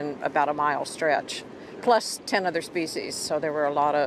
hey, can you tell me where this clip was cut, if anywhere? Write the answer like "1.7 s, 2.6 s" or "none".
1.0 s